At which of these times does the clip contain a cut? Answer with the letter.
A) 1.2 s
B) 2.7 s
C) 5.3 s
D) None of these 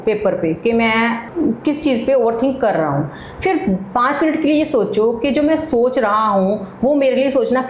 A